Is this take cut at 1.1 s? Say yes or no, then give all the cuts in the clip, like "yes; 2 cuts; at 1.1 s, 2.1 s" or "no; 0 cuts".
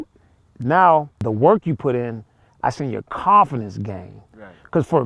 yes; 1 cut; at 1.1 s